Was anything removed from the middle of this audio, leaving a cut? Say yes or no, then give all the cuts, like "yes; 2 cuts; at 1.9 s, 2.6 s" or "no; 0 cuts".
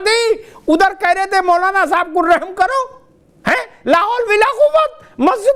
no; 0 cuts